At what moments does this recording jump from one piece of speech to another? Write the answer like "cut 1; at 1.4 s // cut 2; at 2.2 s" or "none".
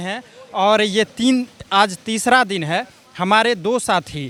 none